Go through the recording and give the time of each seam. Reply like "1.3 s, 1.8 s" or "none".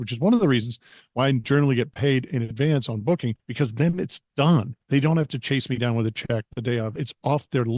3.4 s, 4.8 s, 6.9 s